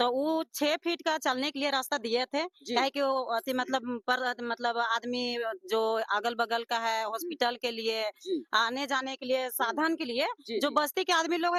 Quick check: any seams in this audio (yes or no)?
no